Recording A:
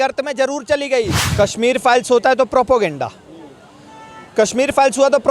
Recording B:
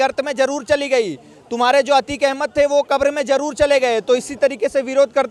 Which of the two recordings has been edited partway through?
A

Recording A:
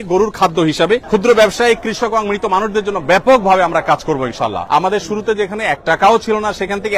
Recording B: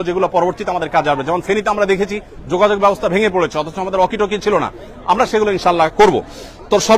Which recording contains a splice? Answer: A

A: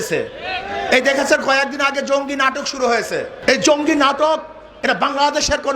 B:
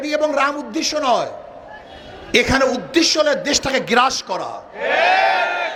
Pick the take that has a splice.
A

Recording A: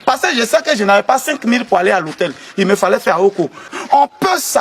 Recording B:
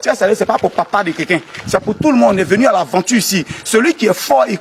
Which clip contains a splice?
A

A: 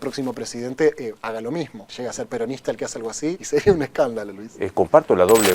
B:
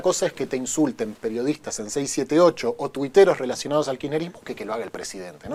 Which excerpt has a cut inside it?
A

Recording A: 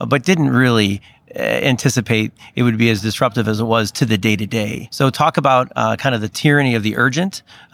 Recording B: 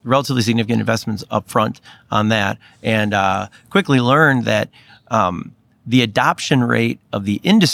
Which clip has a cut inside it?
A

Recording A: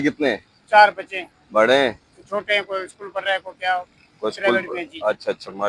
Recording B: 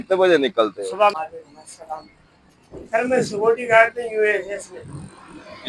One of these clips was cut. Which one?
B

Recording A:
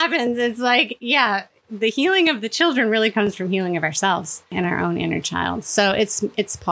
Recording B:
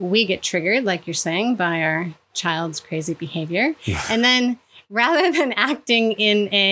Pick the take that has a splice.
A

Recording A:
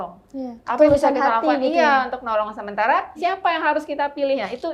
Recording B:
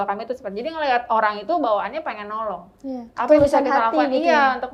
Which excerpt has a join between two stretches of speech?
A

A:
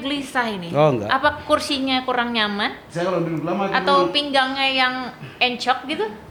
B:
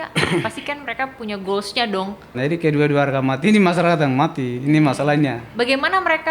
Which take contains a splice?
B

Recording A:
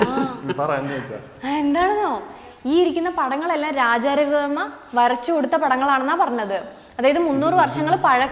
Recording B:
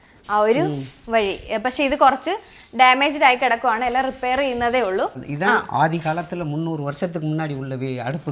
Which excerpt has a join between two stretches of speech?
B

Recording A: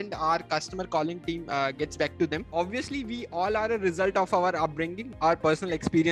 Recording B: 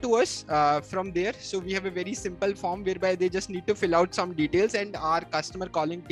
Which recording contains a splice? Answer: A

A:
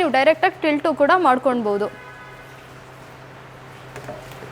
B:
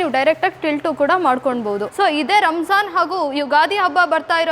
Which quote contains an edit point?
B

